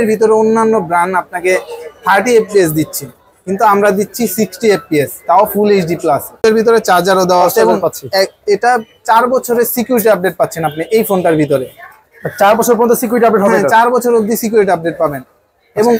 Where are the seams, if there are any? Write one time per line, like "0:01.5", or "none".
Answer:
0:06.4